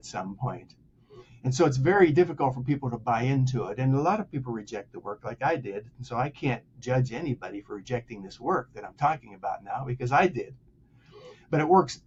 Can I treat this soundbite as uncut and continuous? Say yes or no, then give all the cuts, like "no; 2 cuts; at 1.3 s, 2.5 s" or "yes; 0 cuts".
yes; 0 cuts